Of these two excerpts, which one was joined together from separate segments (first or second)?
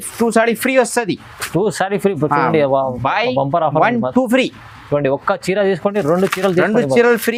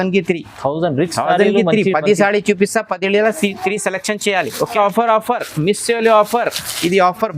second